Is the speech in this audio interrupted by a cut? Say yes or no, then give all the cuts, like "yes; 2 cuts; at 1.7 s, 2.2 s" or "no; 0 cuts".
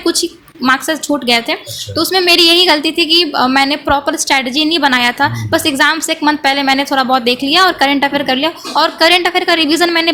no; 0 cuts